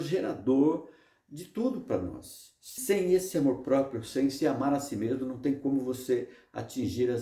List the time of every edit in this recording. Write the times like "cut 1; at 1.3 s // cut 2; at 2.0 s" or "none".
cut 1; at 2.7 s